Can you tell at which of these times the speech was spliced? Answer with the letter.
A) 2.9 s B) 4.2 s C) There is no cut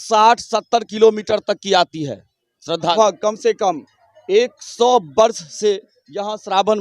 A